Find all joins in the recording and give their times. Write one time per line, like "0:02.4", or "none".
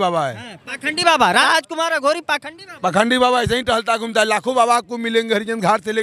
0:01.4